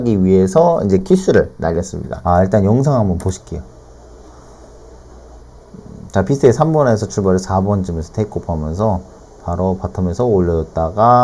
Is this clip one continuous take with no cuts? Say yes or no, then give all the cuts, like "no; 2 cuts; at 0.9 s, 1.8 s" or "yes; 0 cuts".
no; 1 cut; at 2.1 s